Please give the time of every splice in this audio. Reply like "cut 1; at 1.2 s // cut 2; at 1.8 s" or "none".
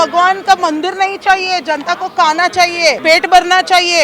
cut 1; at 3.0 s